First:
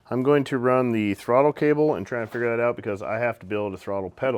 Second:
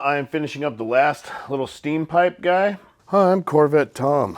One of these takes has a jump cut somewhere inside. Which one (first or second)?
second